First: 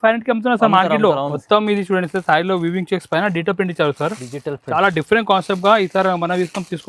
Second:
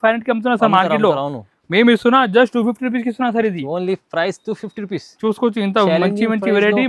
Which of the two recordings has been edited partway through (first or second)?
first